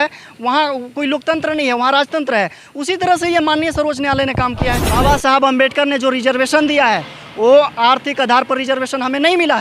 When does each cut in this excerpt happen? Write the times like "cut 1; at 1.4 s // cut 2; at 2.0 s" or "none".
cut 1; at 4.9 s